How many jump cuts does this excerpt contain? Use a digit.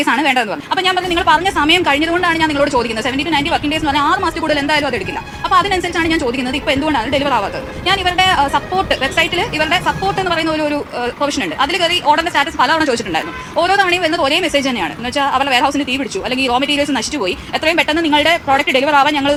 0